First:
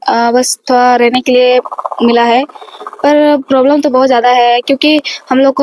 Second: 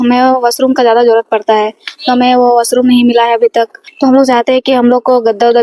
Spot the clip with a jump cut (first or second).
second